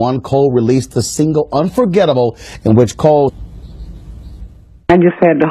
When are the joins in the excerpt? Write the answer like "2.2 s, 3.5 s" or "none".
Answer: none